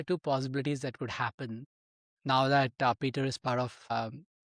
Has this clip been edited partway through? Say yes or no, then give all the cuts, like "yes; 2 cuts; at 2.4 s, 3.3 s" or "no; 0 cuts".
no; 0 cuts